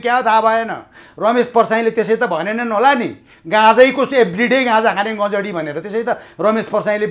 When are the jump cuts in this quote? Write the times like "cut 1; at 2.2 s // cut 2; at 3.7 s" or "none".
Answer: none